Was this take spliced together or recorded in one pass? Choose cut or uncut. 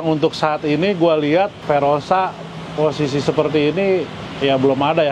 cut